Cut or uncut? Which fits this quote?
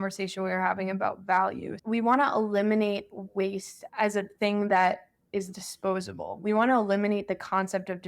cut